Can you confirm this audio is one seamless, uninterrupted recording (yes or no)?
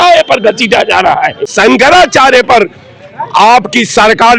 no